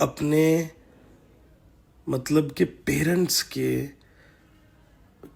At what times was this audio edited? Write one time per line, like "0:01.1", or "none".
none